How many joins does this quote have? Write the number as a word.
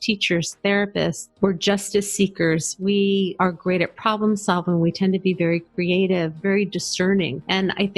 two